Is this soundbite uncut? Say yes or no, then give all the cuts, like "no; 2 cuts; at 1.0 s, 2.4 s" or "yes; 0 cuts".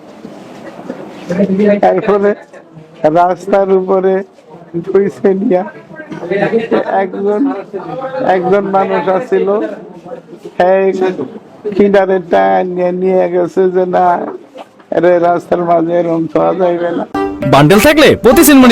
no; 1 cut; at 17.2 s